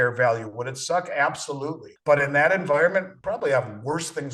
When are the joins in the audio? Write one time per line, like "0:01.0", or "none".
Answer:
0:01.9
0:03.1